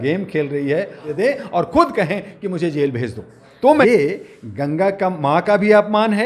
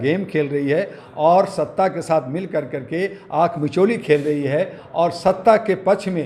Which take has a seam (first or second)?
first